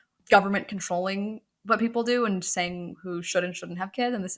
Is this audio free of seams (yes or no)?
yes